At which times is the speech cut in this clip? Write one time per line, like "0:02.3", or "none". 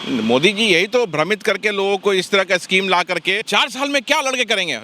0:03.4